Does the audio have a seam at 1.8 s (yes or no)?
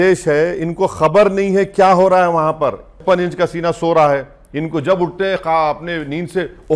no